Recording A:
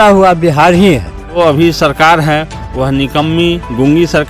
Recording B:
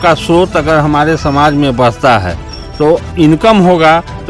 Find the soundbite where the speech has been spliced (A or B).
A